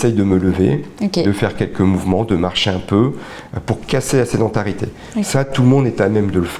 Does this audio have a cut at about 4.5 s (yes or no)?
no